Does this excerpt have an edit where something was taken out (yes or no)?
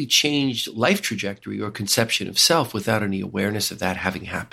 no